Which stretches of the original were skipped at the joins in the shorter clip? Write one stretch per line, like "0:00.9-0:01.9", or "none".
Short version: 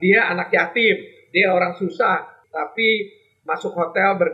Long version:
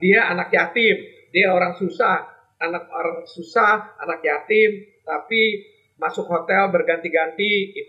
0:02.4-0:04.9